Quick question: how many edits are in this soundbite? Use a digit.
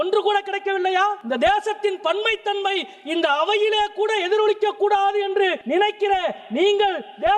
2